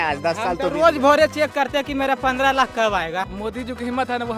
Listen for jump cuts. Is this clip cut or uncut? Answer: cut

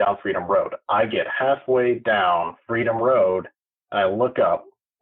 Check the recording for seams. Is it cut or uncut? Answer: uncut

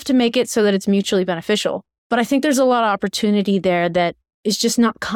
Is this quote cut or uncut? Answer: cut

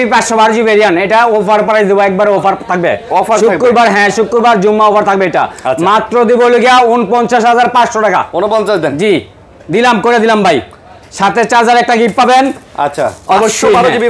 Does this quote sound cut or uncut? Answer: uncut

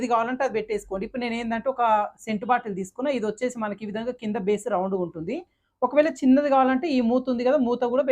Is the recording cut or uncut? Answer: uncut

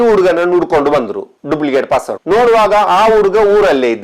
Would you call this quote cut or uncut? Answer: uncut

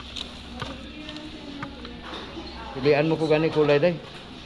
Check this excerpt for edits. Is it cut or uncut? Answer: cut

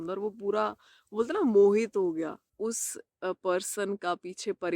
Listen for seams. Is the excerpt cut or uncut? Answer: cut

